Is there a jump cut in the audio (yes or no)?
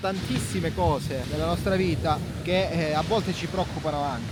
no